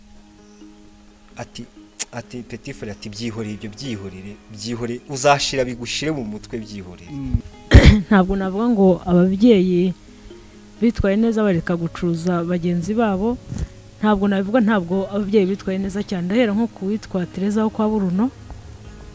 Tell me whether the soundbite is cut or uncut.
cut